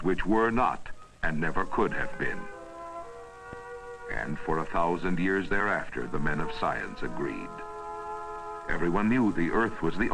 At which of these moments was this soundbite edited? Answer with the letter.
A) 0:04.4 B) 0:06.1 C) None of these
A